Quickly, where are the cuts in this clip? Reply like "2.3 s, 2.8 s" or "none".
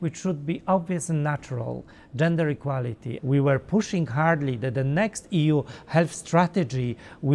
3.1 s